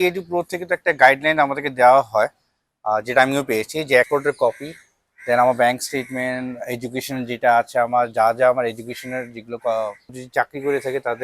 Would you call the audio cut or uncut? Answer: cut